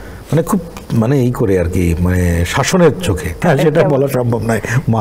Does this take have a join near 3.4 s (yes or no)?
yes